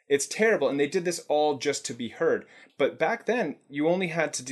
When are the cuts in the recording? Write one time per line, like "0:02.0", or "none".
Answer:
0:02.6